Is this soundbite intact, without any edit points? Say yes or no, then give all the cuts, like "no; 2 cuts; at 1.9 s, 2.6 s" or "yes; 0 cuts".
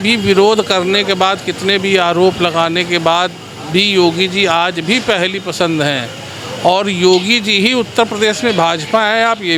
yes; 0 cuts